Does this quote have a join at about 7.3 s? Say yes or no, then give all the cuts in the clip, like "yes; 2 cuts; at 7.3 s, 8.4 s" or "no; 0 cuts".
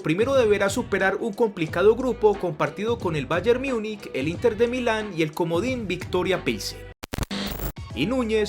yes; 1 cut; at 7.3 s